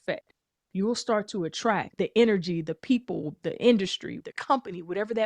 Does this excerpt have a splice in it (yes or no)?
yes